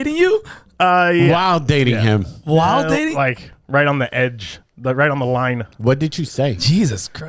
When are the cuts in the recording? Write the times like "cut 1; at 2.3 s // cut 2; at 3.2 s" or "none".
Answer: none